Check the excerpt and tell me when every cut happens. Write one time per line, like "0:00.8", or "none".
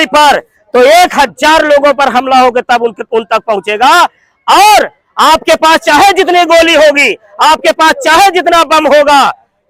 none